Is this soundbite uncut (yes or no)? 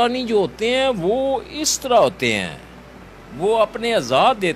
yes